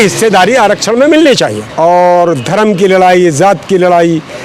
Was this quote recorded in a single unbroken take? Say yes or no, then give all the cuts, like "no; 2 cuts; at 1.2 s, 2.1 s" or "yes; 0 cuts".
no; 1 cut; at 1.6 s